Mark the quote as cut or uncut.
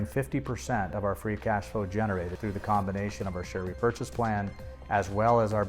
cut